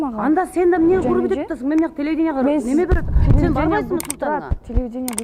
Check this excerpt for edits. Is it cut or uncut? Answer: uncut